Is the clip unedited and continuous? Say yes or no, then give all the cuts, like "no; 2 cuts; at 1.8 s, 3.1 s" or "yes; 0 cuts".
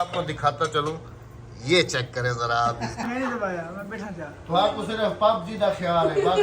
no; 1 cut; at 3.0 s